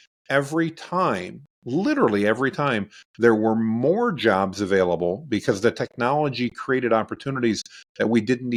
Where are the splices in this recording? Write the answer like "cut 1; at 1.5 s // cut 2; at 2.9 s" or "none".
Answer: none